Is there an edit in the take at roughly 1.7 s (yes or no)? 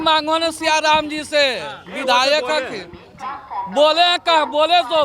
no